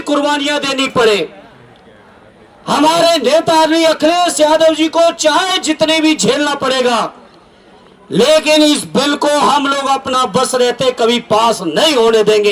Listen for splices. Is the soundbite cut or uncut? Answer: uncut